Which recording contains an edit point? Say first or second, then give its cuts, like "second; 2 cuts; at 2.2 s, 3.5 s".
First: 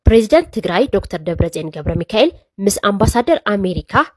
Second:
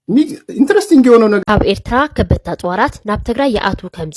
second; 1 cut; at 1.4 s